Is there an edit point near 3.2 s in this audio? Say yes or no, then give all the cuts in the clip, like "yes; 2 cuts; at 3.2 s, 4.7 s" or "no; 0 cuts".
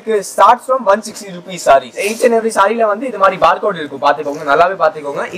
no; 1 cut; at 2.0 s